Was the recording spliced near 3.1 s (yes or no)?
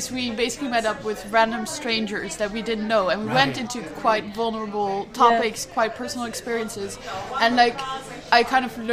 no